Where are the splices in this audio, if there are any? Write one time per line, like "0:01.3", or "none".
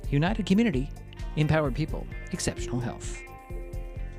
none

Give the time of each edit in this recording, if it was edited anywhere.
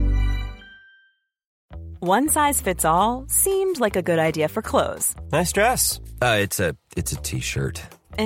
0:01.5

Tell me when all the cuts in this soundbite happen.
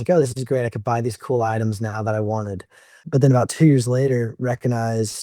0:03.0

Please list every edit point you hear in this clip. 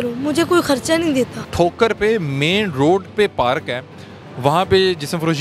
0:01.4

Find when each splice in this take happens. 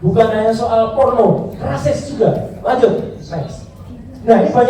none

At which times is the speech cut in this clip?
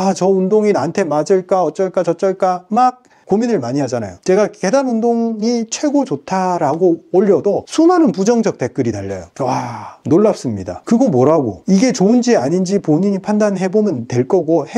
none

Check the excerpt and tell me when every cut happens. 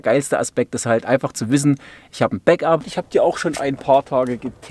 0:02.9

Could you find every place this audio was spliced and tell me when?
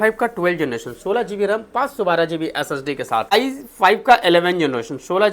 0:03.3

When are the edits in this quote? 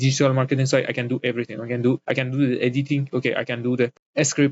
none

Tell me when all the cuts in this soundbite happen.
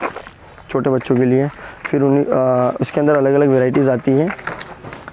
none

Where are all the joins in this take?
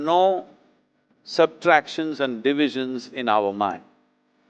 none

